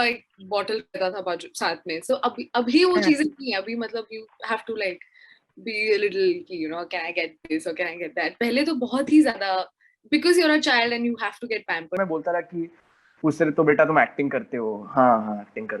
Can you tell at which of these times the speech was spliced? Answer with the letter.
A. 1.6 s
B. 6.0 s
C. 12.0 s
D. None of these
C